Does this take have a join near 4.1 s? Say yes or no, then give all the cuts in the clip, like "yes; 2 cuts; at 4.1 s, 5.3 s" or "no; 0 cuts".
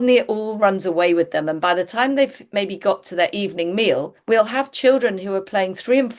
yes; 1 cut; at 4.1 s